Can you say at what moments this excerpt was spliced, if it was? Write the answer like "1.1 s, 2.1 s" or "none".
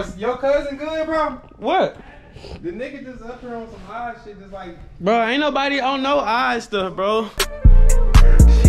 7.4 s